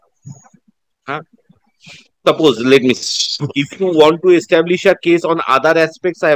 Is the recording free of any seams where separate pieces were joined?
yes; 0 cuts

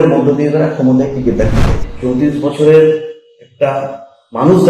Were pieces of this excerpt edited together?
yes; 1 cut; at 1.9 s

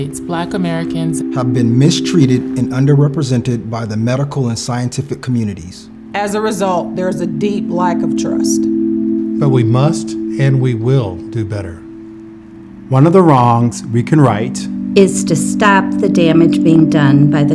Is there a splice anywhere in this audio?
yes; 2 cuts; at 2.0 s, 16.7 s

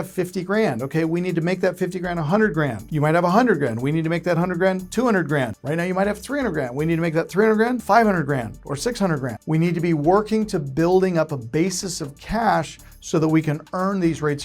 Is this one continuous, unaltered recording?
no; 4 cuts; at 2.8 s, 5.6 s, 7.8 s, 9.3 s

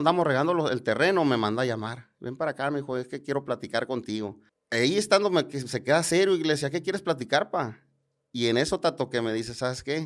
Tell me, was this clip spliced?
yes; 1 cut; at 4.5 s

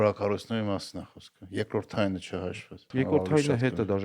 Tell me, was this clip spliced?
yes; 1 cut; at 2.8 s

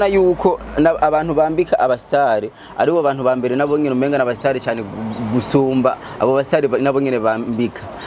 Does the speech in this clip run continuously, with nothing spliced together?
yes; 0 cuts

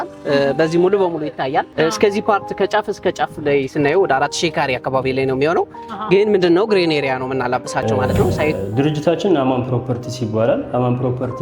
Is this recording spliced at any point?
yes; 2 cuts; at 1.7 s, 8.5 s

